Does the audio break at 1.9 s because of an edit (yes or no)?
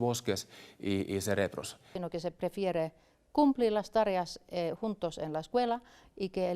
yes